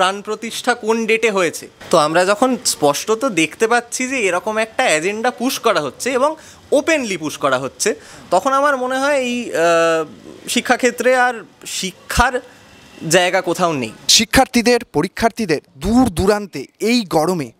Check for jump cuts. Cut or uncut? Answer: cut